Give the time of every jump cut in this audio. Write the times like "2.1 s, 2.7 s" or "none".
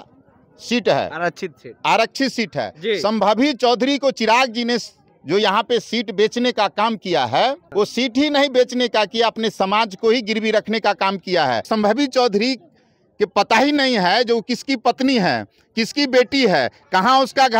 7.7 s, 11.7 s